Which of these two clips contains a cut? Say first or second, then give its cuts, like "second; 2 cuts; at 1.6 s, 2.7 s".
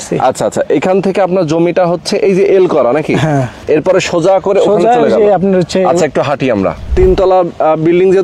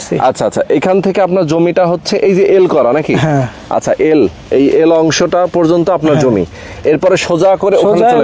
first; 2 cuts; at 3.5 s, 6.9 s